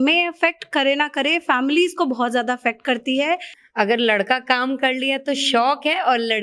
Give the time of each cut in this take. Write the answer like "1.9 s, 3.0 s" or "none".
3.6 s